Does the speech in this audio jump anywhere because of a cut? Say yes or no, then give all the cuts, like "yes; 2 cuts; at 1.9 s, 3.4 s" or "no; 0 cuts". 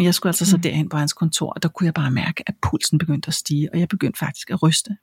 no; 0 cuts